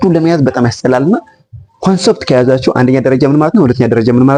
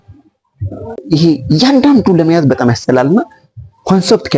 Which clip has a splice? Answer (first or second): second